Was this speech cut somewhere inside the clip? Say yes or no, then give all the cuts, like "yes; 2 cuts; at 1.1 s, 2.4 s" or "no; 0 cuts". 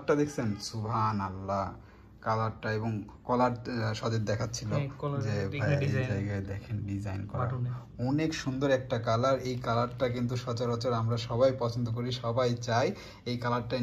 no; 0 cuts